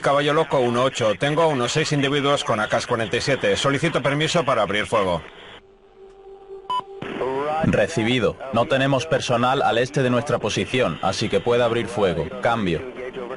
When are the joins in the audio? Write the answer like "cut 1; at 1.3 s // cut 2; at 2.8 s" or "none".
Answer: none